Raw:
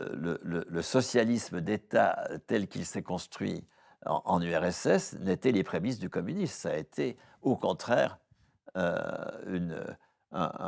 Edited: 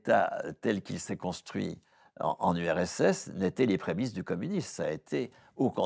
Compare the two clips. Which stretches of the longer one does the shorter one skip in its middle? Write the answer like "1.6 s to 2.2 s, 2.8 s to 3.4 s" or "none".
none